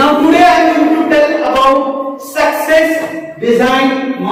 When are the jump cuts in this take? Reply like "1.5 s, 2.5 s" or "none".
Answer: none